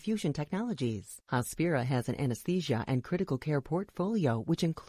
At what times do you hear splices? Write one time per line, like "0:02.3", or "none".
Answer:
0:01.1